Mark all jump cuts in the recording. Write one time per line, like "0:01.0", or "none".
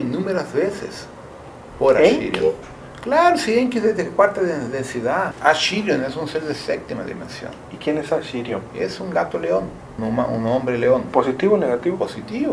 0:05.3
0:09.9